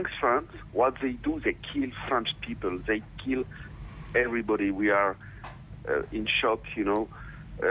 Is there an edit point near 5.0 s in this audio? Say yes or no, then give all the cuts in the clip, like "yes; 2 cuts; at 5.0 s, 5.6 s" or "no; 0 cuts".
yes; 1 cut; at 5.0 s